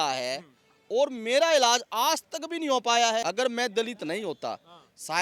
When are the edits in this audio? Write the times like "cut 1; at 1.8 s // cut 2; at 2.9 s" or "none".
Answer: cut 1; at 3.2 s